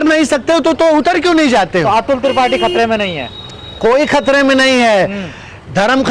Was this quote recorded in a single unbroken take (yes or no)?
yes